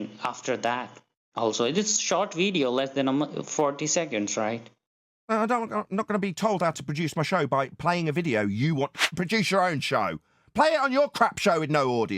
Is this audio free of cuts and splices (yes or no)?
no